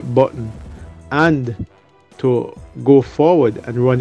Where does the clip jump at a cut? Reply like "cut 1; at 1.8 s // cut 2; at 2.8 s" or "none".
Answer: none